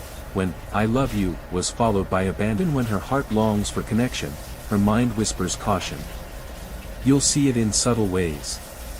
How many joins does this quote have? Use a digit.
1